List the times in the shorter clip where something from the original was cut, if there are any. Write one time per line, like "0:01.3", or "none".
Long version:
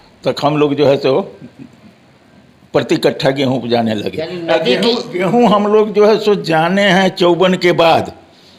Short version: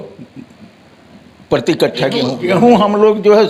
0:02.3